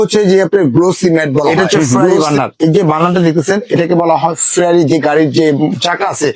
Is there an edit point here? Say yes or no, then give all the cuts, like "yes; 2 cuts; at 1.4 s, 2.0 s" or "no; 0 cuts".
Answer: yes; 1 cut; at 2.2 s